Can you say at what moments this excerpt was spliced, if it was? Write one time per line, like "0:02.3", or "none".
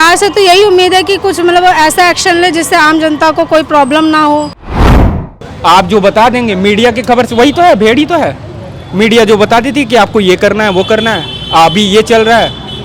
0:04.9